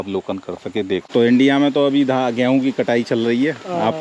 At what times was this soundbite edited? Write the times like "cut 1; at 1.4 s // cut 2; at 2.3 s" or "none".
cut 1; at 1.1 s